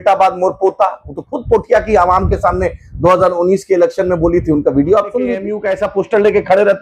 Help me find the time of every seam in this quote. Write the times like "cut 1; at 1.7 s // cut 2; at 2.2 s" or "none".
cut 1; at 5.6 s